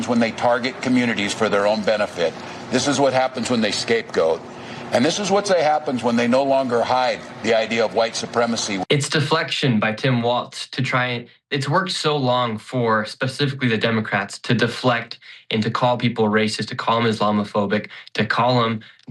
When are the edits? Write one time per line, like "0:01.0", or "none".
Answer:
0:08.8